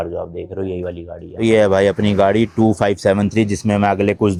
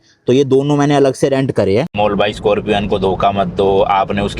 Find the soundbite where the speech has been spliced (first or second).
second